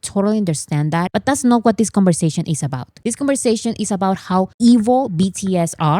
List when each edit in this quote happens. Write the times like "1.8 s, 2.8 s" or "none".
1.1 s